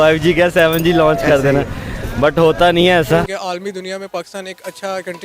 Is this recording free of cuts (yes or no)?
yes